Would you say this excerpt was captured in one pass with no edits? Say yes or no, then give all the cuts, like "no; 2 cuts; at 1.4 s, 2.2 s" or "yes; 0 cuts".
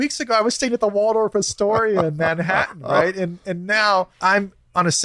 no; 1 cut; at 4.1 s